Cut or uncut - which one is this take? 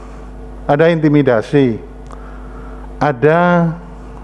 uncut